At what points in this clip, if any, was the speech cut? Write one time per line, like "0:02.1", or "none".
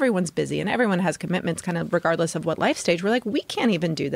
none